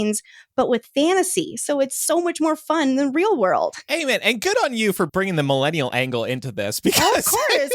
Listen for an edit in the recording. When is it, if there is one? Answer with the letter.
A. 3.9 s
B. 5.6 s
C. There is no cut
A